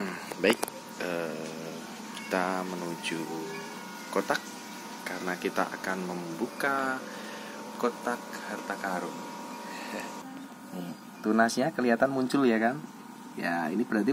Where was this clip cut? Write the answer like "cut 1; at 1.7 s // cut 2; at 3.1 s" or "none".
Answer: cut 1; at 10.2 s